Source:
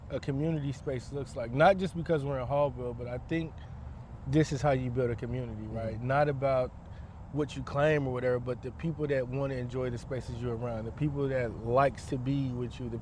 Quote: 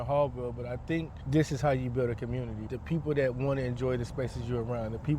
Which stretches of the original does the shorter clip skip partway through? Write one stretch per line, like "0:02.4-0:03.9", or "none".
0:03.6-0:04.2
0:05.7-0:08.7